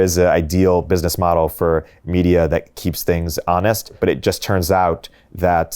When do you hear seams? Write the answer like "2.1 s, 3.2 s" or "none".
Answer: 2.9 s, 4.0 s